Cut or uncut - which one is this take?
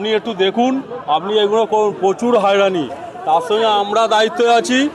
uncut